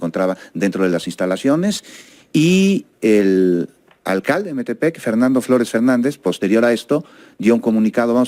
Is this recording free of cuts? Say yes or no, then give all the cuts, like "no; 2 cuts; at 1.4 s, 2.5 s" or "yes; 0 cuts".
yes; 0 cuts